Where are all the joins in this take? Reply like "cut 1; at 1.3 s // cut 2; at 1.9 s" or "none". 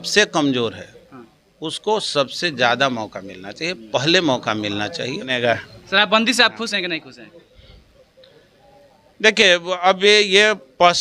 cut 1; at 5.3 s